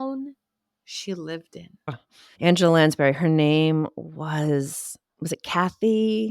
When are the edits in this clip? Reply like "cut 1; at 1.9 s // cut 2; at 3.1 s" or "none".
cut 1; at 1.9 s